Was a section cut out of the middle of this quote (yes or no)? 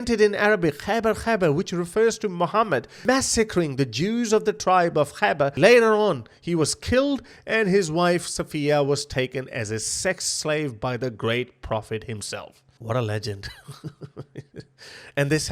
yes